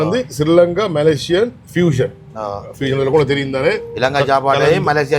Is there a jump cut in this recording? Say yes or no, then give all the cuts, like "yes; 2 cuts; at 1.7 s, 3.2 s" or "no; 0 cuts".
no; 0 cuts